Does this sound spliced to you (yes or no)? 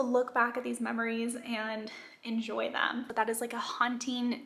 yes